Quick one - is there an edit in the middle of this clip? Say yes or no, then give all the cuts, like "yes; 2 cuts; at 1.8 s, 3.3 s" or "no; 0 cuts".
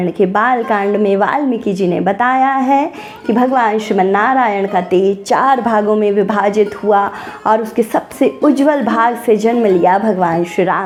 no; 0 cuts